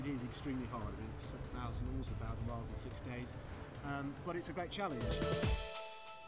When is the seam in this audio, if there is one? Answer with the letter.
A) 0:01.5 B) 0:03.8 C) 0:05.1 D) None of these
C